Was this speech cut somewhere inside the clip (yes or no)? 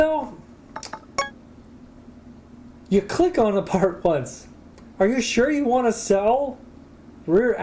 no